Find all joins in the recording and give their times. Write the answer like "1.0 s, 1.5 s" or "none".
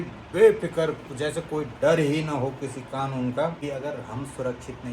3.6 s